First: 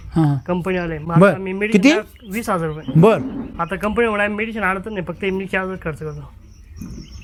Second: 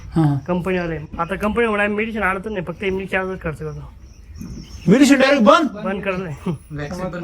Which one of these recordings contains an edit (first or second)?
second